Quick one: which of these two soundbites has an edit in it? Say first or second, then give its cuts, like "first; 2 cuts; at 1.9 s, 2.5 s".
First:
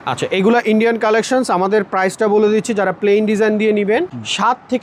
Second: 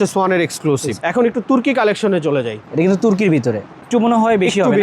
second; 2 cuts; at 1.0 s, 3.8 s